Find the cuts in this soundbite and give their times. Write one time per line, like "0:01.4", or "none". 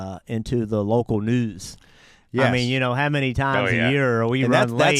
none